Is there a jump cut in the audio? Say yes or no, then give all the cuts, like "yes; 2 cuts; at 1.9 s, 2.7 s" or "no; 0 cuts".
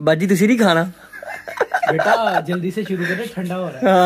no; 0 cuts